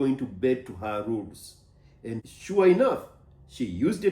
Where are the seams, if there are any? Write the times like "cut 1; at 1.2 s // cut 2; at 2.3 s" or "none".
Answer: cut 1; at 2.2 s